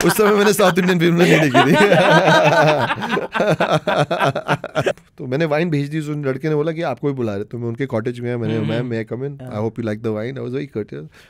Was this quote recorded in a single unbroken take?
no; 1 cut; at 4.9 s

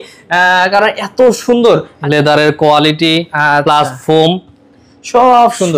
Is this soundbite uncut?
no; 1 cut; at 1.9 s

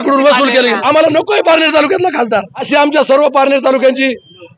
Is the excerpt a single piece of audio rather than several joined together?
no; 2 cuts; at 0.8 s, 2.7 s

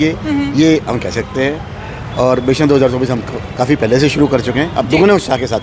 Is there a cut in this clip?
no; 0 cuts

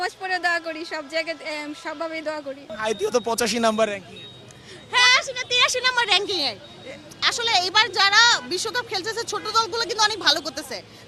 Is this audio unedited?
yes; 0 cuts

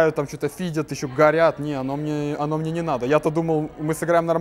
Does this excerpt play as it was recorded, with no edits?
yes; 0 cuts

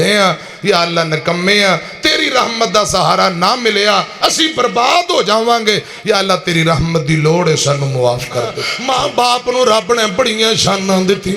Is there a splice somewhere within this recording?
yes; 1 cut; at 8.7 s

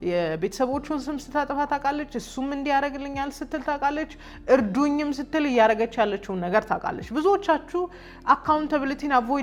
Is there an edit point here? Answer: no; 0 cuts

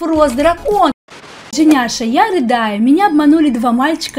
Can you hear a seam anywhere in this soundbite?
yes; 1 cut; at 1.0 s

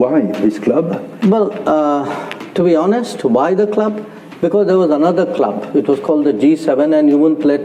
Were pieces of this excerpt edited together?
yes; 1 cut; at 1.1 s

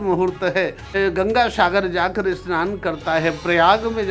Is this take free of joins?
no; 1 cut; at 0.9 s

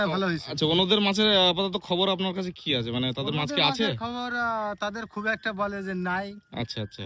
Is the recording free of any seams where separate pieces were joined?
yes; 0 cuts

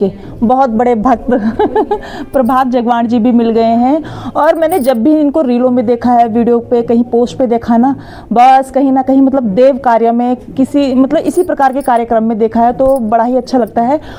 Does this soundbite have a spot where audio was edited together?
no; 0 cuts

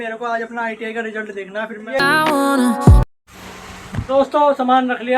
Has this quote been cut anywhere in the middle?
yes; 1 cut; at 2.0 s

